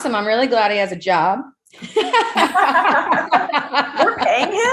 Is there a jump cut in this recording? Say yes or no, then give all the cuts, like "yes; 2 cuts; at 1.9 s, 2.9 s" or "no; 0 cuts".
no; 0 cuts